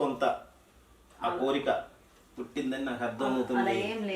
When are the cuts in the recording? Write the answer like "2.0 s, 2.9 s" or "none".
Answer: none